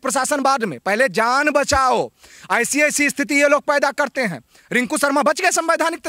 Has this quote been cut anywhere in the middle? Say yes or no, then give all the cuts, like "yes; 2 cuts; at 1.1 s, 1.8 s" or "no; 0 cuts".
no; 0 cuts